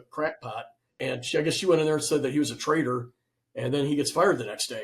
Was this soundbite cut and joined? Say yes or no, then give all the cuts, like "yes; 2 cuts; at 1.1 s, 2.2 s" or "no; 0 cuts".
yes; 1 cut; at 1.0 s